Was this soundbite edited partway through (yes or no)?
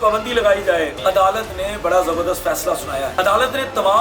yes